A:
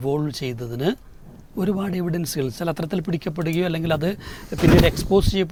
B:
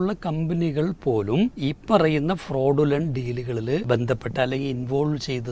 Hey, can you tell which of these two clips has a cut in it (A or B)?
B